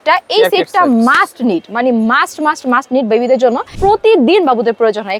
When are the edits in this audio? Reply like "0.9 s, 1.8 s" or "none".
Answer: 3.7 s